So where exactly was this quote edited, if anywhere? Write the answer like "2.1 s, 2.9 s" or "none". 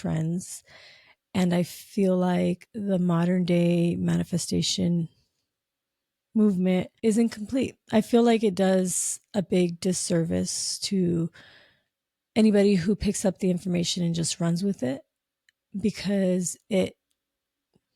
6.9 s

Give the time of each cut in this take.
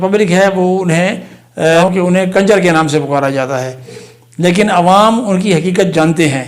1.9 s, 4.0 s

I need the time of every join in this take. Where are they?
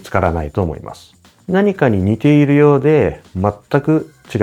none

